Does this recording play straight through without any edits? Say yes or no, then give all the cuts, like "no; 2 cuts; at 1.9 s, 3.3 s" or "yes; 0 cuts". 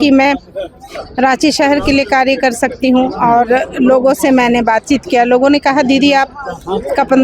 yes; 0 cuts